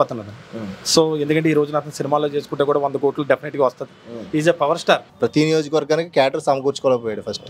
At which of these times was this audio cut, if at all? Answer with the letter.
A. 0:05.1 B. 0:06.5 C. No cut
A